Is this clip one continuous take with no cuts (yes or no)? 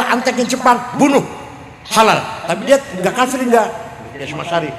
yes